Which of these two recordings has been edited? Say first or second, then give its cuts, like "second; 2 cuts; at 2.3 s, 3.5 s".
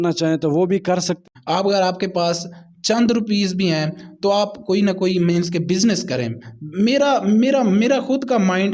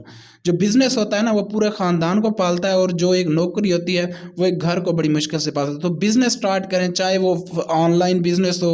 first; 1 cut; at 1.2 s